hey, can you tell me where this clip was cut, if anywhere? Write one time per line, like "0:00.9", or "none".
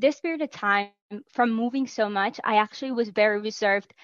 none